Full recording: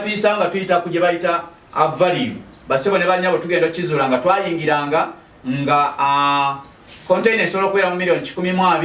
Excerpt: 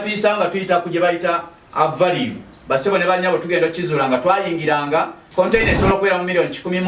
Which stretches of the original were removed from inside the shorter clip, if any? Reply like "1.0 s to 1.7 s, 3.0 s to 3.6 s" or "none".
5.2 s to 6.9 s